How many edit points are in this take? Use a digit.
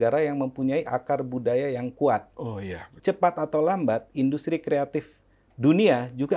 1